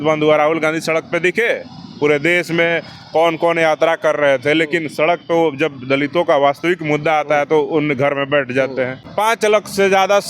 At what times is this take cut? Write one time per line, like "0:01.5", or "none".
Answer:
0:09.1